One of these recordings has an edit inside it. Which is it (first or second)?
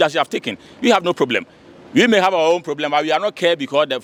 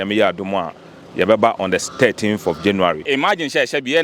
second